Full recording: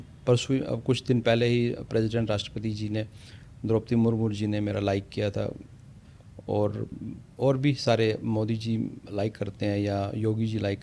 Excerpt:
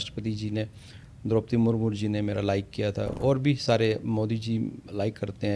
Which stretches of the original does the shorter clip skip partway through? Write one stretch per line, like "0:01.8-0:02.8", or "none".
0:05.5-0:07.3